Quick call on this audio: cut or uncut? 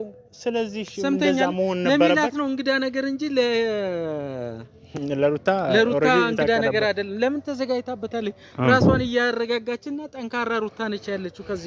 uncut